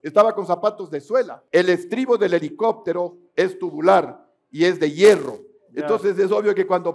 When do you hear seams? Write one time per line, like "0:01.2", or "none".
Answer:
0:01.4